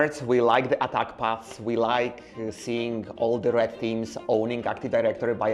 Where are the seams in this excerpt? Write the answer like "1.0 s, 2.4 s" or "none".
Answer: none